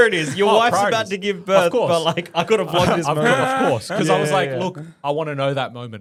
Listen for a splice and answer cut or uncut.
uncut